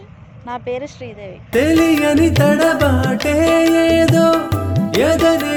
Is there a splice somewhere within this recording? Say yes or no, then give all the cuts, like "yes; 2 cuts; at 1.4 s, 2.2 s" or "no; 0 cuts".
no; 0 cuts